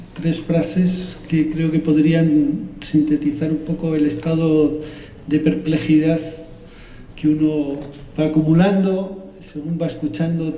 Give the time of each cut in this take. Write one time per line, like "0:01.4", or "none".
none